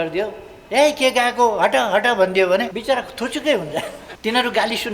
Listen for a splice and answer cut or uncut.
cut